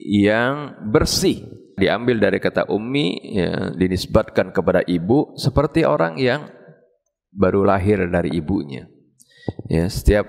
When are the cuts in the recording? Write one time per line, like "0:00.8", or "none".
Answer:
0:01.8